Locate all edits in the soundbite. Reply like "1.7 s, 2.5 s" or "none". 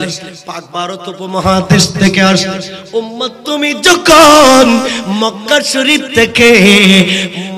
none